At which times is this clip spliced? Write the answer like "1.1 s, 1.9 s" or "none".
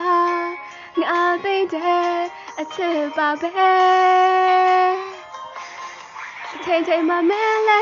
none